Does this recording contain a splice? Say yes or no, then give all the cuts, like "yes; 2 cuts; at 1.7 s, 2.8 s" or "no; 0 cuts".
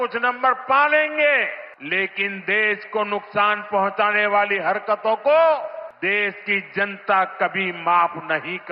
yes; 2 cuts; at 1.7 s, 5.9 s